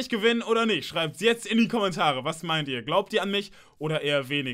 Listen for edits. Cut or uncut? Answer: uncut